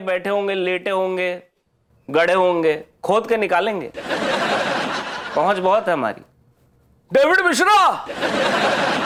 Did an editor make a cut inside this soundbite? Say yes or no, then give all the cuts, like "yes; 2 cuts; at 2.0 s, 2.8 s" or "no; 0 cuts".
no; 0 cuts